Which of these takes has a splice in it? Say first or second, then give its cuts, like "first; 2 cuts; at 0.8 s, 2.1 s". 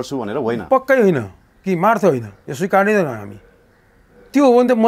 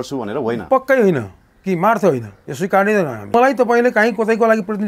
second; 1 cut; at 3.3 s